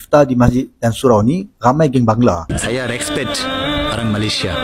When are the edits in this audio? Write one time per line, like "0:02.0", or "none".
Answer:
0:02.5

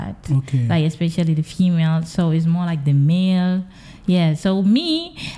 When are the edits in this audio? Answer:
none

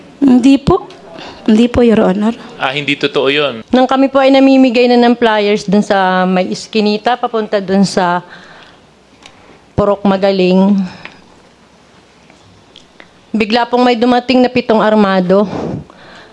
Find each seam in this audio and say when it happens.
0:03.6

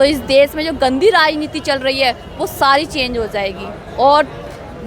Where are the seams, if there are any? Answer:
none

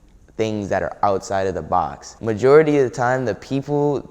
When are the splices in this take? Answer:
0:02.0

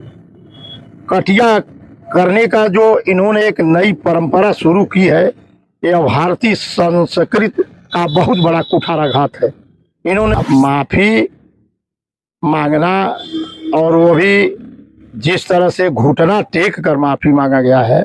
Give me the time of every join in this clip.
0:10.3

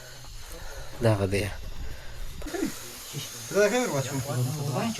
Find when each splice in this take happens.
0:02.5

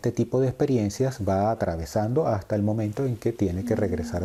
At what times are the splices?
none

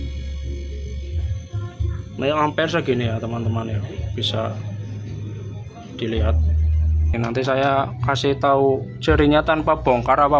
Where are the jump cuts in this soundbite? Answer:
0:07.1

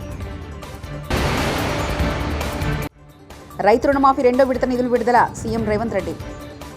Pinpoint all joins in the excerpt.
0:01.1

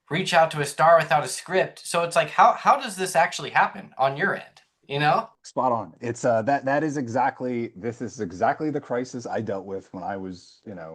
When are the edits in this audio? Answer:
0:05.3

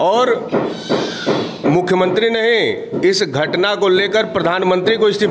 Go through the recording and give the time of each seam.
none

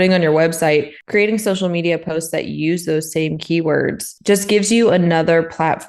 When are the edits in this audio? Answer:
none

